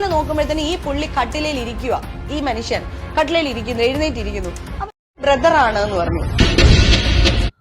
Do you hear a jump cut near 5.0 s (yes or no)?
yes